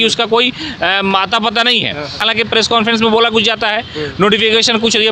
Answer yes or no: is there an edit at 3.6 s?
no